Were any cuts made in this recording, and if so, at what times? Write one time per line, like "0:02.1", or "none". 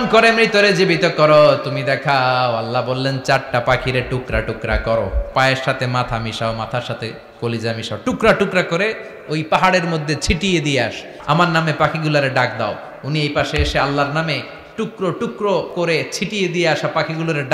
0:05.2
0:11.1
0:15.7